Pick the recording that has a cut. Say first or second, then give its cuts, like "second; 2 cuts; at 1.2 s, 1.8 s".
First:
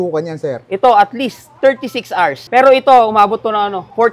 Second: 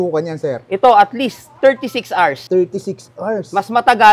first; 1 cut; at 2.4 s